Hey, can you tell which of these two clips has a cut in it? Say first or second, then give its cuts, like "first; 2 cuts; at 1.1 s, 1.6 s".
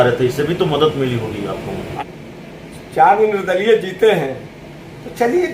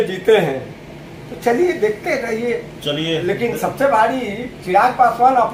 first; 1 cut; at 1.9 s